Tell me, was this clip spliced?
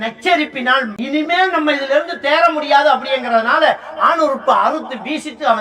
yes; 1 cut; at 0.9 s

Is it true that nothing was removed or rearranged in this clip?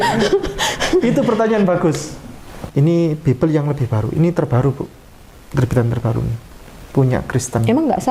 no; 1 cut; at 2.6 s

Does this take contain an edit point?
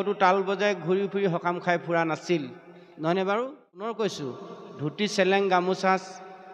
yes; 1 cut; at 3.9 s

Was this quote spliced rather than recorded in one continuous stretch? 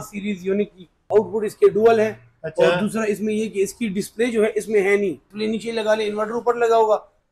yes; 2 cuts; at 1.0 s, 5.3 s

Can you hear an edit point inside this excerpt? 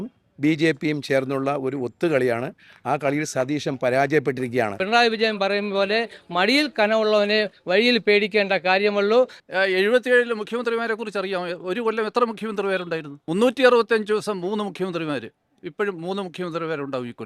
yes; 3 cuts; at 4.8 s, 9.4 s, 13.1 s

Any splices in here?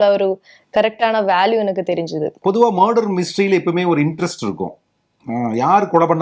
yes; 1 cut; at 2.4 s

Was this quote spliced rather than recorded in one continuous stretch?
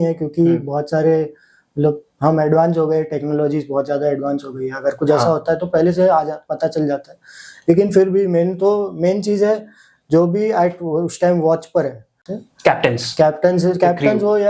no; 0 cuts

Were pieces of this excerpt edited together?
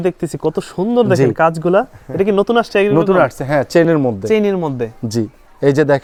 no; 0 cuts

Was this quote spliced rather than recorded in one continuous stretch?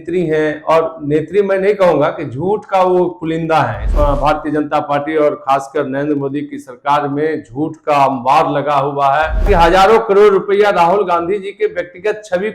yes; 2 cuts; at 3.9 s, 9.4 s

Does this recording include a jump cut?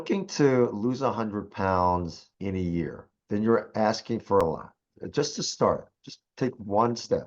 yes; 3 cuts; at 2.2 s, 3.1 s, 4.4 s

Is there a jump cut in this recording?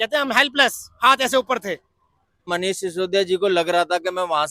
yes; 1 cut; at 2.5 s

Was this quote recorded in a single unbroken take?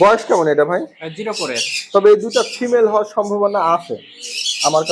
yes; 0 cuts

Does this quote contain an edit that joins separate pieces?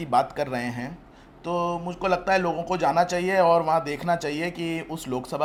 no; 0 cuts

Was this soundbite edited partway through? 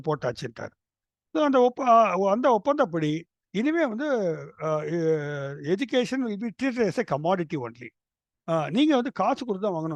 no; 0 cuts

